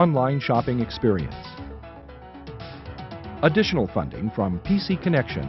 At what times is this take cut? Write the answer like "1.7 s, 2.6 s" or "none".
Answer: 1.3 s, 3.2 s